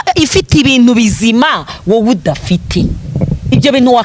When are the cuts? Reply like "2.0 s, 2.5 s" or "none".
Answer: none